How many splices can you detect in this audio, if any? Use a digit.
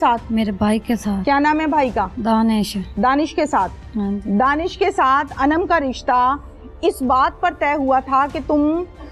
0